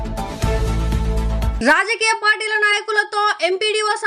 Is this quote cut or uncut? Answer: cut